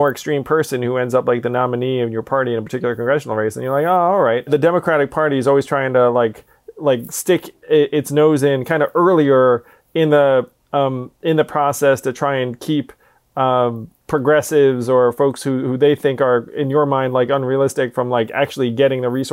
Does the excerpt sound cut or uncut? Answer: cut